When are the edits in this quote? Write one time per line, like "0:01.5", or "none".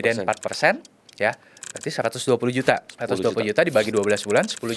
0:02.9